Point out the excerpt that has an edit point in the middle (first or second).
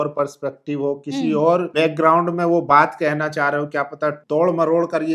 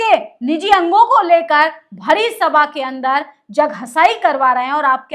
first